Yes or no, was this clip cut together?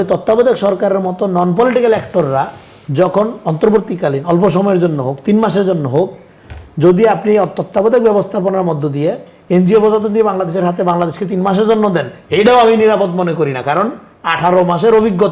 no